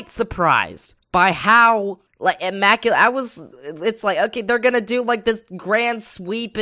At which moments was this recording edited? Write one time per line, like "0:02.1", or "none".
none